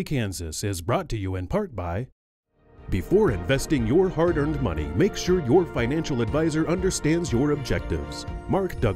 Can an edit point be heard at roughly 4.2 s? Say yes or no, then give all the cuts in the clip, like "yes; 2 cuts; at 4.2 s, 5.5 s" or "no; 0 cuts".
no; 1 cut; at 2.2 s